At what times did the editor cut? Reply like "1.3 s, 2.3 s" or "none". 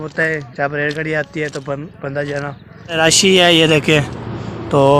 3.0 s